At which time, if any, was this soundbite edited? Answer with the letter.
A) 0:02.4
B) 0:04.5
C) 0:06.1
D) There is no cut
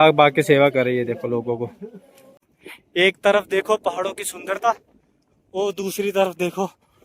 A